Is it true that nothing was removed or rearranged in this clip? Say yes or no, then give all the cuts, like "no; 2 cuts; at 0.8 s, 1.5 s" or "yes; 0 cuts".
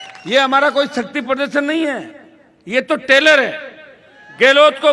yes; 0 cuts